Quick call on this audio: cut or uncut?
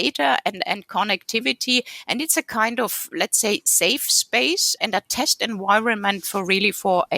cut